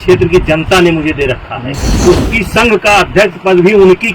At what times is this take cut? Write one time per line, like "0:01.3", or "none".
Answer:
0:02.0